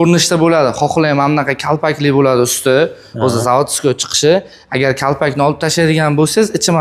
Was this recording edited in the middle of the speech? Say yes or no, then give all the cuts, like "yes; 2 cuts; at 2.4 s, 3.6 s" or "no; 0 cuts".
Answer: no; 0 cuts